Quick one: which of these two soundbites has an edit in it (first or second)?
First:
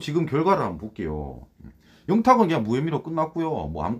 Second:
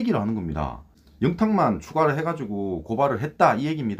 second